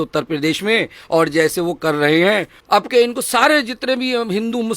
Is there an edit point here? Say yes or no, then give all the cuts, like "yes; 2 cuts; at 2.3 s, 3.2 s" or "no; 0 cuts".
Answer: yes; 1 cut; at 2.5 s